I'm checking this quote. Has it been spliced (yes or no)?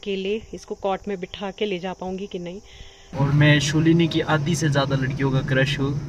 yes